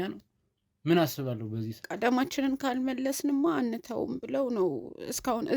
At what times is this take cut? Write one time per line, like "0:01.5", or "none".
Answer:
0:01.8